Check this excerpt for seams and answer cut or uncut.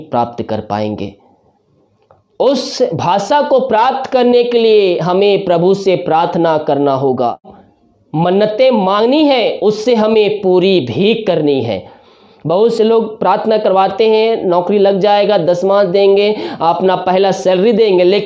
cut